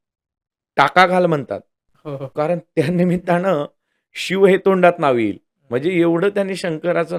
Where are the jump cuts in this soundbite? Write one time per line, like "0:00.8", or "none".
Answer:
none